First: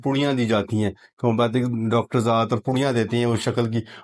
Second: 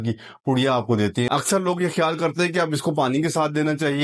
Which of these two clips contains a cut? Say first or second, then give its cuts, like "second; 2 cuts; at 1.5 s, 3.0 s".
second; 1 cut; at 1.3 s